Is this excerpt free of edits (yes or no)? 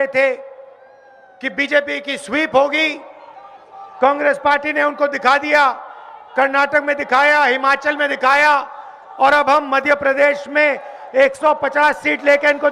yes